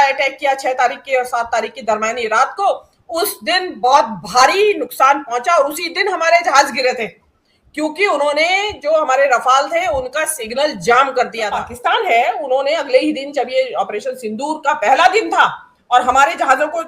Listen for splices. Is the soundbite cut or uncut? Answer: cut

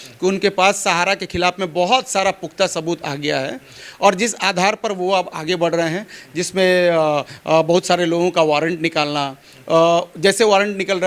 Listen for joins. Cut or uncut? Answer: uncut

